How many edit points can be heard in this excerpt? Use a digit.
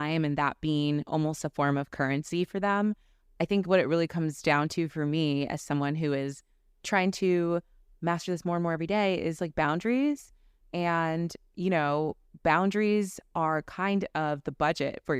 0